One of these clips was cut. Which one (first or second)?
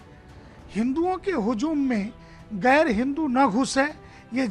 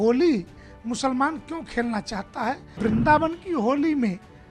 second